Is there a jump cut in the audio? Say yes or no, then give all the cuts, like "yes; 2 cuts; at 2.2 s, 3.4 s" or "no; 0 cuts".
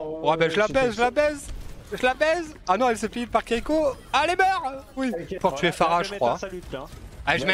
yes; 1 cut; at 5.4 s